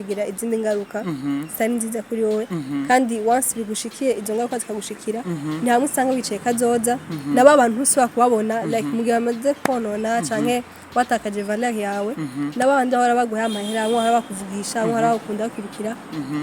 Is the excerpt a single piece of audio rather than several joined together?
yes; 0 cuts

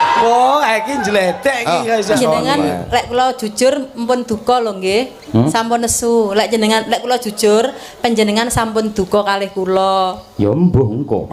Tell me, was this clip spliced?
yes; 1 cut; at 2.2 s

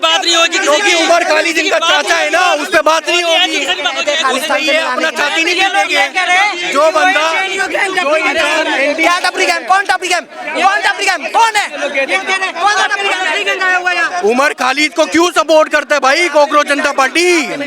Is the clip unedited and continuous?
yes; 0 cuts

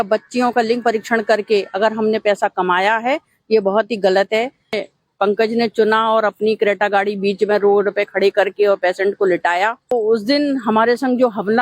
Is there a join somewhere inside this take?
yes; 2 cuts; at 4.8 s, 9.9 s

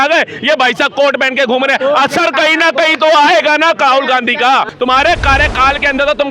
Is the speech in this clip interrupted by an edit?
yes; 1 cut; at 4.7 s

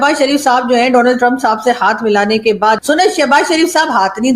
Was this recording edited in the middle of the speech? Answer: yes; 1 cut; at 2.8 s

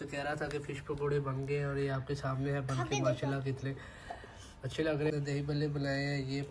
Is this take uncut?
no; 1 cut; at 5.1 s

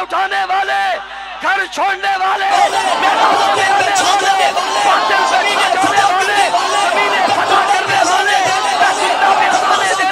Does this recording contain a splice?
no; 0 cuts

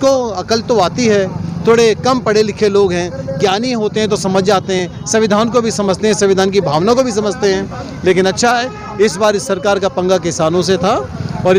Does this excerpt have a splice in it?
no; 0 cuts

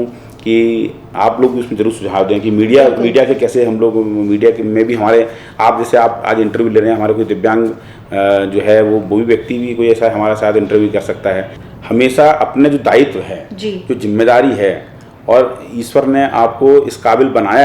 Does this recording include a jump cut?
yes; 1 cut; at 11.5 s

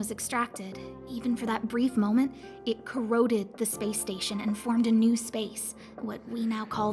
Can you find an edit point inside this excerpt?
no; 0 cuts

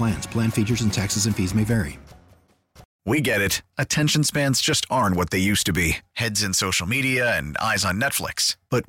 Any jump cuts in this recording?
yes; 1 cut; at 2.9 s

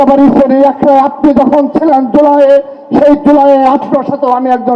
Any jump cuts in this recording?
no; 0 cuts

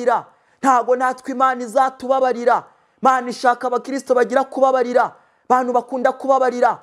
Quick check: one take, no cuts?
yes; 0 cuts

